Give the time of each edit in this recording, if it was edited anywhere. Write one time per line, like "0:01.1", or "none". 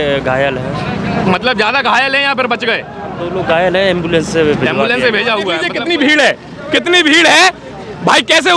0:05.7